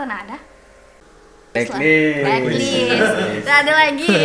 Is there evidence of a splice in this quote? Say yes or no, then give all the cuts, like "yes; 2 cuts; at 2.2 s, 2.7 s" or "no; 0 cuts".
no; 0 cuts